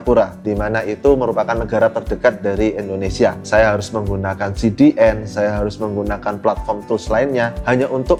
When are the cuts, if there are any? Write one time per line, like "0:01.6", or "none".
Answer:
none